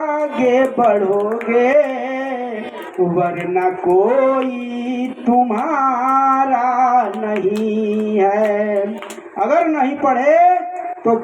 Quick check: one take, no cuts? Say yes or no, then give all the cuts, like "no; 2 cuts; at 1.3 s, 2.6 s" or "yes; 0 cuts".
yes; 0 cuts